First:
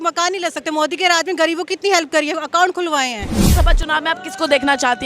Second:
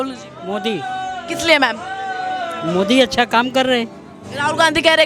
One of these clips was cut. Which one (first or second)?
first